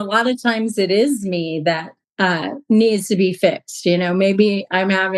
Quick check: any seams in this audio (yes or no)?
yes